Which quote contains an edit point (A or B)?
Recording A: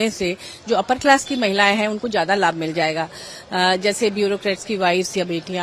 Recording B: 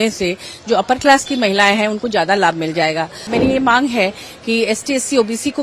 B